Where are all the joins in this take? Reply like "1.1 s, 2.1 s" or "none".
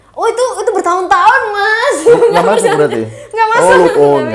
none